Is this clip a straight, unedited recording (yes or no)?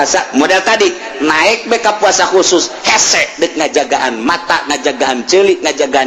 yes